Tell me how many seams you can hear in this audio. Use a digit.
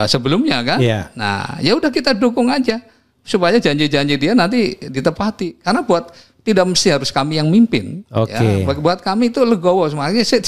0